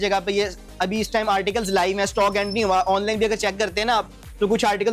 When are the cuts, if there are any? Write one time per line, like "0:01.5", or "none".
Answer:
none